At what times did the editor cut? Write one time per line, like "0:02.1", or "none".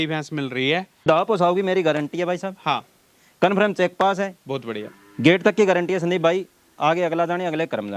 0:01.0